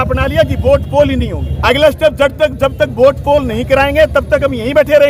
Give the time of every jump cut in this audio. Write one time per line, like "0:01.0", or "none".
none